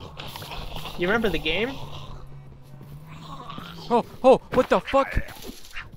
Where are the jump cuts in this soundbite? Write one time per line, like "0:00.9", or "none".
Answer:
none